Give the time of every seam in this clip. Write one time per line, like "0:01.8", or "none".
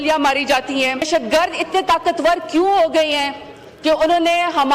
0:01.1